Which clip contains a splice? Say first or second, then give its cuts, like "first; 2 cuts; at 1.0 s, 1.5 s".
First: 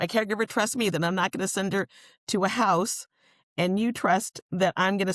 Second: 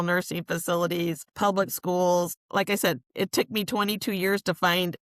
second; 2 cuts; at 1.3 s, 2.4 s